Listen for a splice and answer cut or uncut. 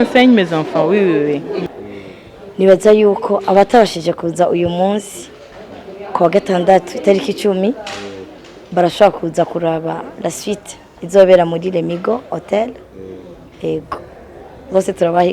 cut